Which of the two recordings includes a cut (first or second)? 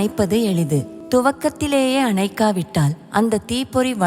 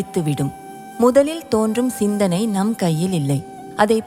first